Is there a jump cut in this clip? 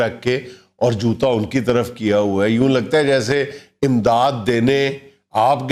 no; 0 cuts

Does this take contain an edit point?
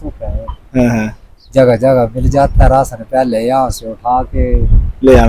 no; 0 cuts

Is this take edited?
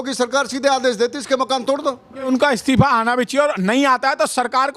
yes; 1 cut; at 2.3 s

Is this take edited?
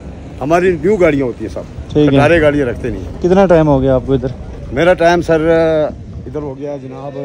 no; 0 cuts

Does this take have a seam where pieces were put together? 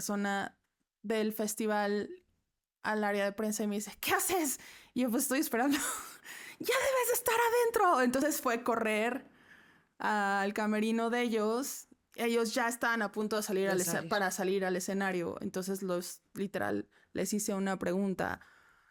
no; 0 cuts

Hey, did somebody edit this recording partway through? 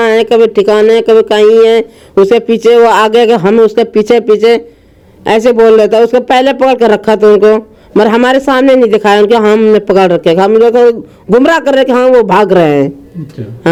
no; 0 cuts

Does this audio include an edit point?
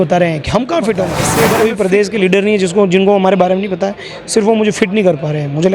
yes; 1 cut; at 1.3 s

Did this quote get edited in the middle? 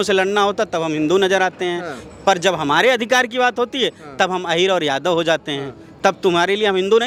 no; 0 cuts

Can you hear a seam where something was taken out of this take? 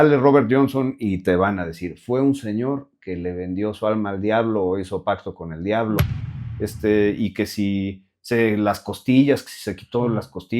yes; 1 cut; at 6.0 s

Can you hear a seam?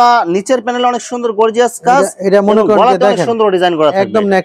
no; 0 cuts

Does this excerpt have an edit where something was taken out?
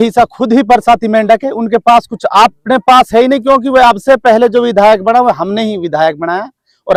no; 0 cuts

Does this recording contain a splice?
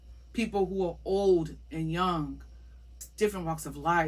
yes; 1 cut; at 3.0 s

